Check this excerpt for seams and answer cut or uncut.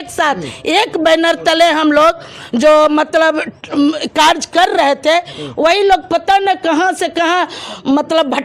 uncut